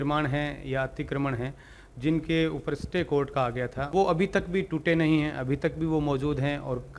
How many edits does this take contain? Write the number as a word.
one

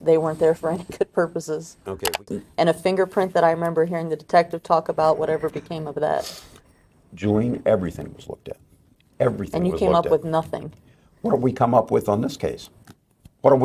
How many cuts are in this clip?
one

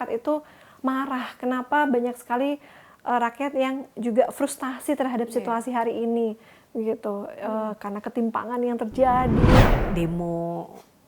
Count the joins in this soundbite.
one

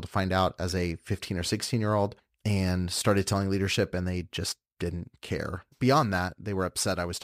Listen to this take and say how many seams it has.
two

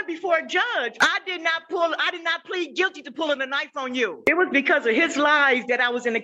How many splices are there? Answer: two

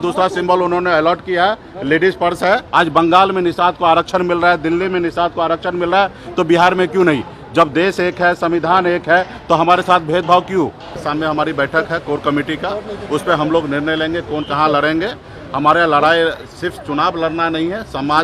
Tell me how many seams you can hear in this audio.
two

